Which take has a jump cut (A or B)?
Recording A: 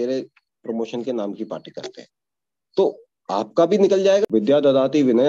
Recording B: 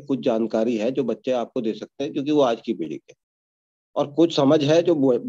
A